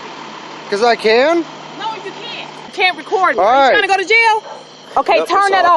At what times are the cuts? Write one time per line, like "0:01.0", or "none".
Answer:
0:02.7
0:04.8